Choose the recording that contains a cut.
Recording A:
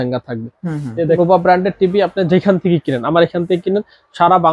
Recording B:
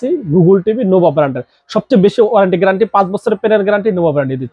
A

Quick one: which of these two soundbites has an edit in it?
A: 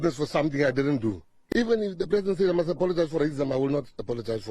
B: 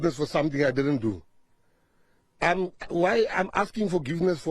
A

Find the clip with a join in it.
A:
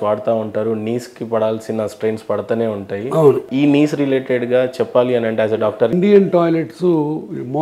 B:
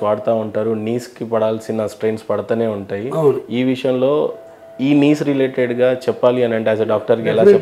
A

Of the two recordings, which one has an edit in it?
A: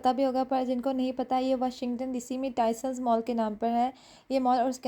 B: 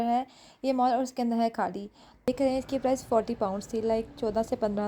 B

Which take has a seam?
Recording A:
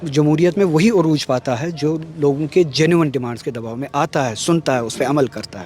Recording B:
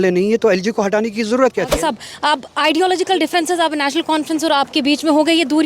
B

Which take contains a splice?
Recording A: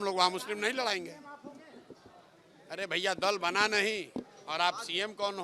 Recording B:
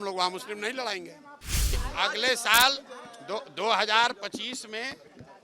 B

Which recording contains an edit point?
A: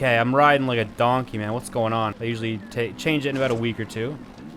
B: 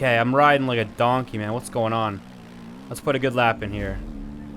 A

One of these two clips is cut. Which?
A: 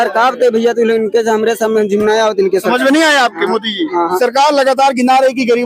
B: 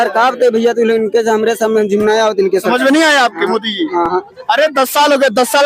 A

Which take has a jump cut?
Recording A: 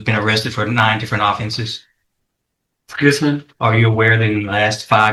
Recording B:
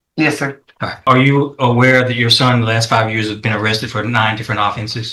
B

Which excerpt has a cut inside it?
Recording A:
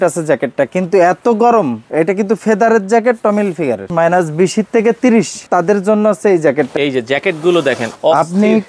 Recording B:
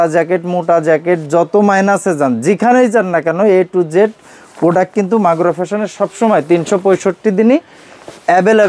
A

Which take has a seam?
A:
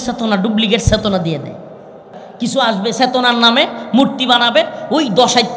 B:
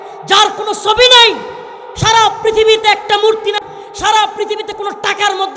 A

